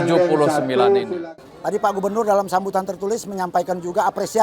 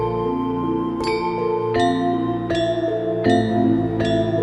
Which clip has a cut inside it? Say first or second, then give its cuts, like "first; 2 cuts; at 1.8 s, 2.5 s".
first; 1 cut; at 1.2 s